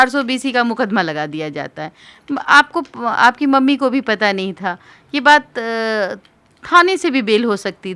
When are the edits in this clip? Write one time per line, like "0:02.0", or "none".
none